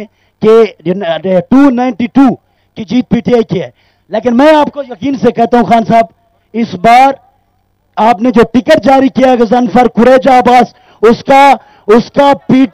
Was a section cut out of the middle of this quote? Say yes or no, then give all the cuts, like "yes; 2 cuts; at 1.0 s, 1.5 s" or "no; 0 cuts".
no; 0 cuts